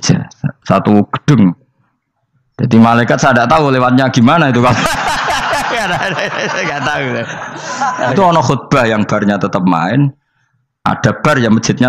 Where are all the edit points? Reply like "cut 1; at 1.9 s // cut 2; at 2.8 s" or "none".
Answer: cut 1; at 8.1 s